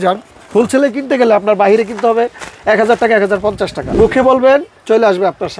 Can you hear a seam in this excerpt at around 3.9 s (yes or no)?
yes